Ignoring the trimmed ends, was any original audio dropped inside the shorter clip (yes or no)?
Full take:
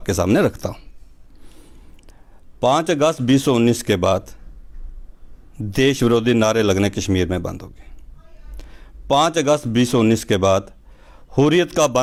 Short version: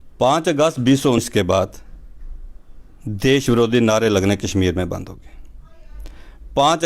yes